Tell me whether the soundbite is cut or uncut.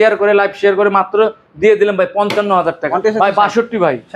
cut